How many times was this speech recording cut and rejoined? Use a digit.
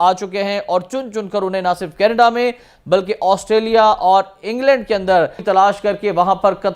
1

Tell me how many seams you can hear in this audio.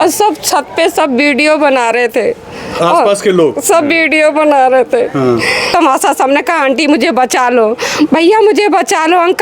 1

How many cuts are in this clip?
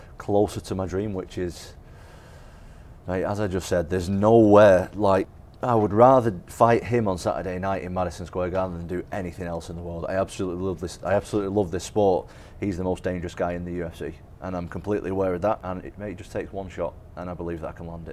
3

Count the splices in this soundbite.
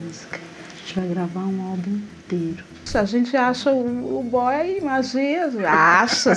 1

